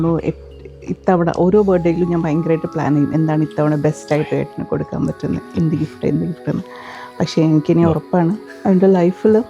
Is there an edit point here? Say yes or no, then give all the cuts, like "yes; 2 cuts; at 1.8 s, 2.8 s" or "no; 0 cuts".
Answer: yes; 1 cut; at 8.5 s